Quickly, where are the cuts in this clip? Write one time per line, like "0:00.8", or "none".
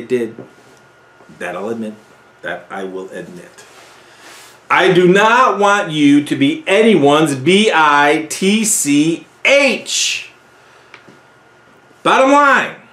none